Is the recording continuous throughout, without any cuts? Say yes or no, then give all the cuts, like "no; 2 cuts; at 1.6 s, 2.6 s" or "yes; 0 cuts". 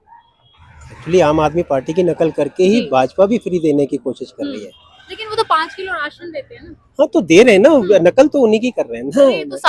yes; 0 cuts